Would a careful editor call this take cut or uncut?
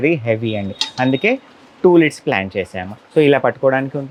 uncut